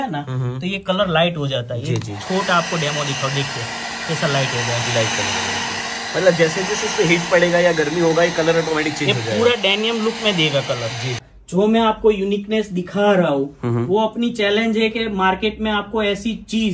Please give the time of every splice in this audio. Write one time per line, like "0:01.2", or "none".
0:11.3